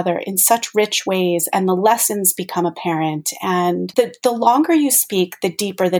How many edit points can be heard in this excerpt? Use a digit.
1